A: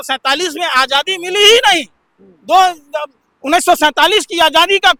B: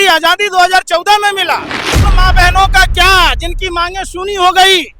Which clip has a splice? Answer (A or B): B